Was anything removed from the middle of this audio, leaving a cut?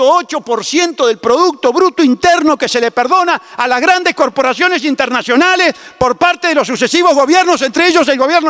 no; 0 cuts

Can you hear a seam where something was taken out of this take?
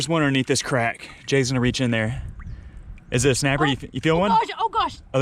no; 0 cuts

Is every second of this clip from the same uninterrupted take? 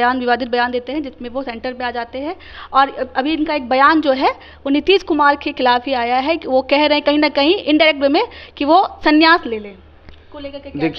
yes; 0 cuts

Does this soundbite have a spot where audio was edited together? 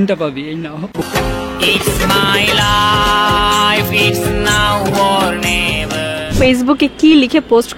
yes; 1 cut; at 6.3 s

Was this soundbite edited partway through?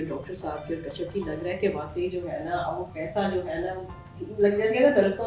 no; 0 cuts

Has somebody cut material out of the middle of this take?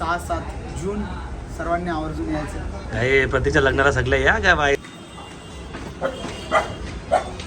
yes; 1 cut; at 4.8 s

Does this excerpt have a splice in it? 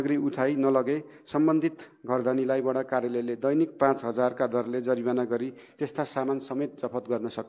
no; 0 cuts

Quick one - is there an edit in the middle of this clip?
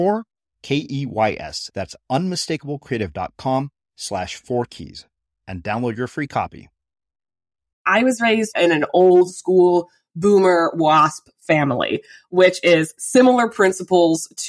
yes; 2 cuts; at 7.8 s, 8.5 s

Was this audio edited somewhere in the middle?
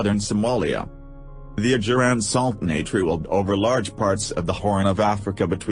yes; 1 cut; at 1.1 s

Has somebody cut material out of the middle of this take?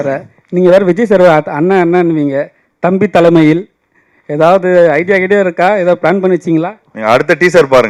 no; 0 cuts

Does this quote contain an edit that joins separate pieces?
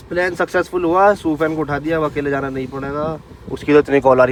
no; 0 cuts

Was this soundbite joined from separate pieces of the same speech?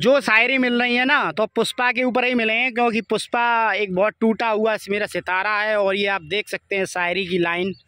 no; 0 cuts

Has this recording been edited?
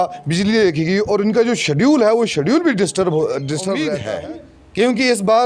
yes; 1 cut; at 3.9 s

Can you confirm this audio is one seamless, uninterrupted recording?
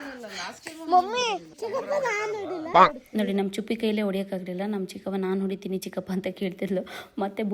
yes; 0 cuts

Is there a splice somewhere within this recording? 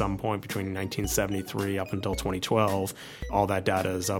yes; 1 cut; at 3.3 s

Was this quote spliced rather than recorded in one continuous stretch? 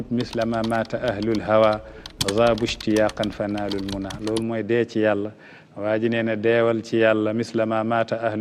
no; 0 cuts

